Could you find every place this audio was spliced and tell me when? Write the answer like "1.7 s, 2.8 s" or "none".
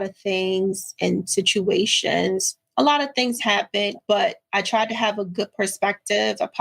4.0 s